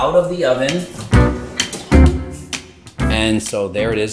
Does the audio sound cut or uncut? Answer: uncut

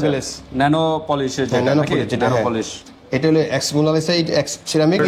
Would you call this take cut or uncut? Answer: uncut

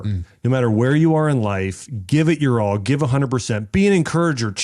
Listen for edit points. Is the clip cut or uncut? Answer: uncut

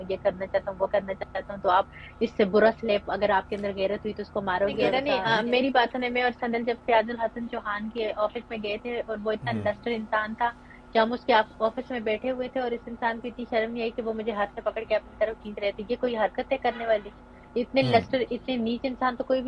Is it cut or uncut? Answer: cut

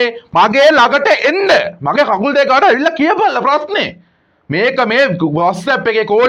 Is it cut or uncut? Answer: uncut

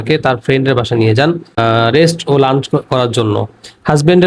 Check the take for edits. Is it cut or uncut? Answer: cut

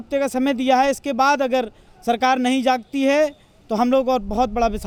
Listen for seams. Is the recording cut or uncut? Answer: uncut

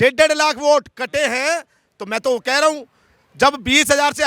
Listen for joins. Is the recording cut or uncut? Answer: uncut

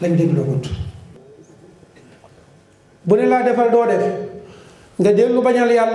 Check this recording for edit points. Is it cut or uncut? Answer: cut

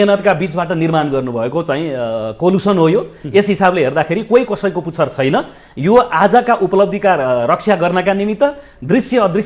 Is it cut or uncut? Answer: uncut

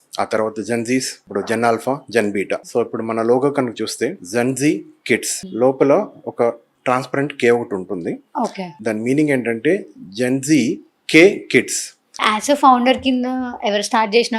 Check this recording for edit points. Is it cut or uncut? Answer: cut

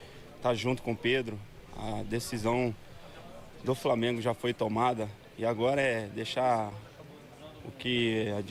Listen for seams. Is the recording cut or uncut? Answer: uncut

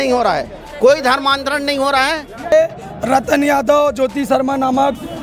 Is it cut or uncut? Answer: cut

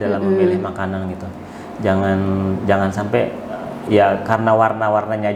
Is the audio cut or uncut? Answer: uncut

